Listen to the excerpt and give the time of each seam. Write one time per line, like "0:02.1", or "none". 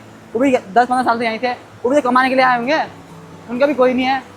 none